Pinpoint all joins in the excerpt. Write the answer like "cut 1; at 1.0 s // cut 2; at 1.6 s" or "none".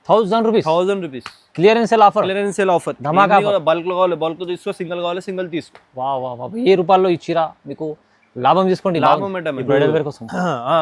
cut 1; at 9.6 s